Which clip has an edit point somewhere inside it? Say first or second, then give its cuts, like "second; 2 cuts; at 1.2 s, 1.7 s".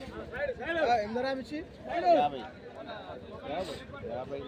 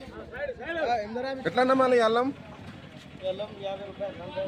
second; 1 cut; at 1.4 s